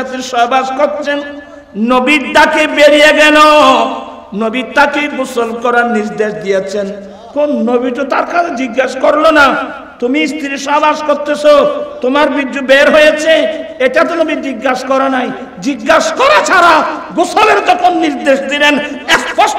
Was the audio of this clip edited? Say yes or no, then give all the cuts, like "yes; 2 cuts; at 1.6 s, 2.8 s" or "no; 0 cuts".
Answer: no; 0 cuts